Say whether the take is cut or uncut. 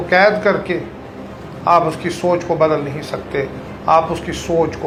uncut